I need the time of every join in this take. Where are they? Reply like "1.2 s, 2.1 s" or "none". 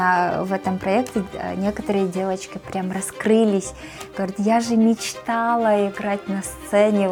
none

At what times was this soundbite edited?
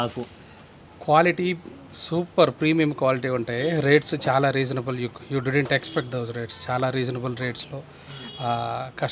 none

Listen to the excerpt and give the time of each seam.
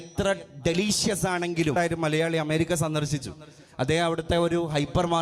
1.7 s

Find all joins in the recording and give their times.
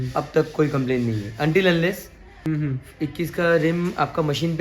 2.3 s

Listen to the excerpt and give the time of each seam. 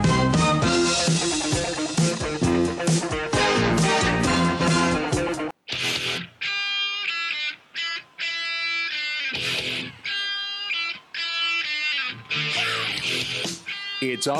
5.6 s

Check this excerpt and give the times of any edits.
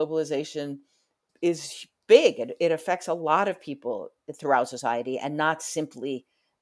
1.2 s

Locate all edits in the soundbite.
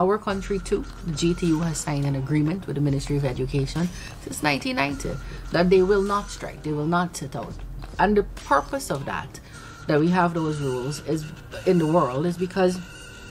none

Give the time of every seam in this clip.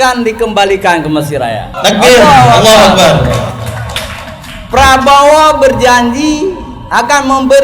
1.7 s

